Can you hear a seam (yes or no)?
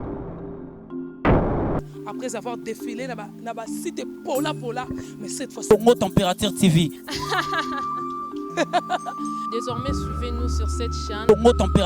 no